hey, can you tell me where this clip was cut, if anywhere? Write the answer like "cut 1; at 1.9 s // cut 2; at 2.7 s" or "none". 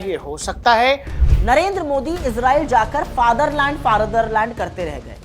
cut 1; at 1.1 s